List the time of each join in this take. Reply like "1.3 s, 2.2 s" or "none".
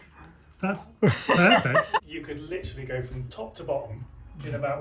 2.1 s